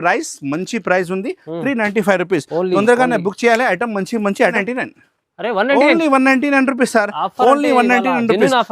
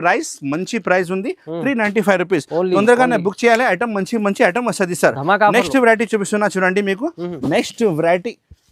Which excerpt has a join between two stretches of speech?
first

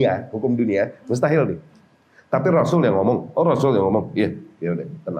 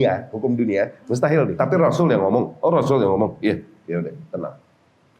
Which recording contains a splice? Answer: second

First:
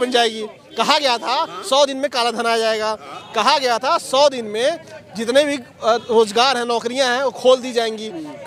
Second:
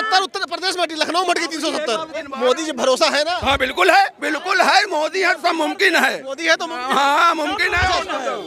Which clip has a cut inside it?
second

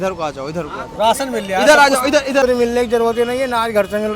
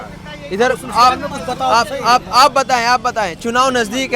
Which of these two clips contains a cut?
first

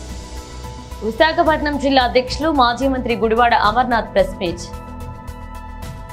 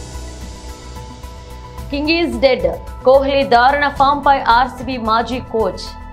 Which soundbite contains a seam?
first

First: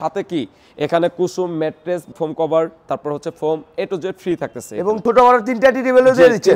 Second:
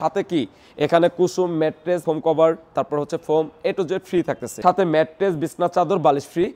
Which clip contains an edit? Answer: second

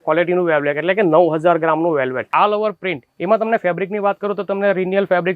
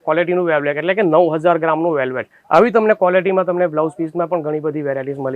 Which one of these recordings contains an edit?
first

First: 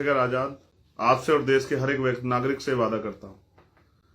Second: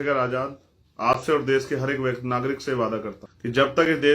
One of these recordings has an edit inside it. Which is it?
second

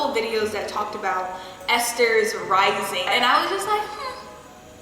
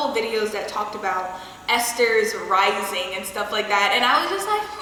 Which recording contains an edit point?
first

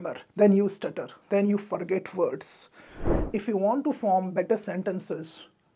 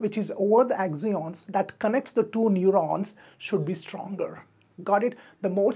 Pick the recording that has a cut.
first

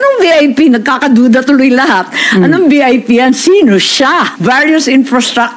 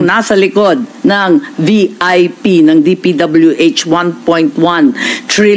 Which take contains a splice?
first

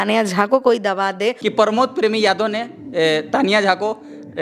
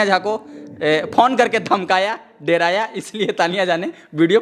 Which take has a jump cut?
first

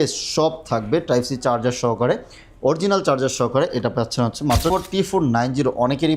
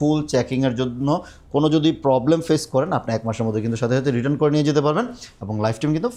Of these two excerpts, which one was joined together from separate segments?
first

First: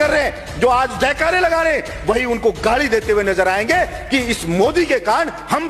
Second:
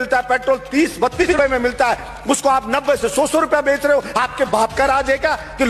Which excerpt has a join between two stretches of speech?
second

